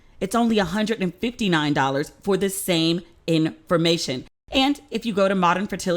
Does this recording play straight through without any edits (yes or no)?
yes